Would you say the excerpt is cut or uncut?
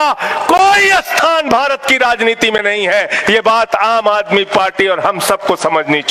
uncut